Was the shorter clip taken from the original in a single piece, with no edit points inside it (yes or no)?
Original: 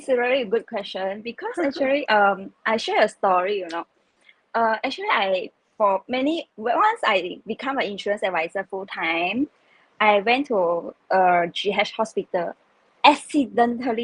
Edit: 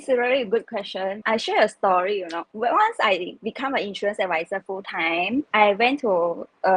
no